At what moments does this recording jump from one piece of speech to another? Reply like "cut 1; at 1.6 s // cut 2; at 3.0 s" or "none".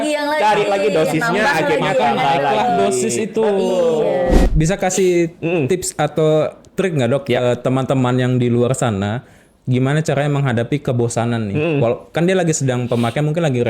cut 1; at 4.4 s